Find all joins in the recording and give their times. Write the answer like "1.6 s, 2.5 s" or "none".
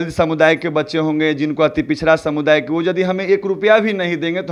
none